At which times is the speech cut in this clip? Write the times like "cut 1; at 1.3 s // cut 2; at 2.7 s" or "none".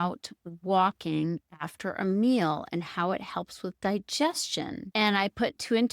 cut 1; at 4.8 s